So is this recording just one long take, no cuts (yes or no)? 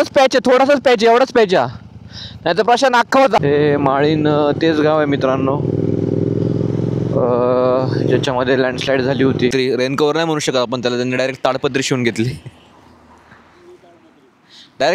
no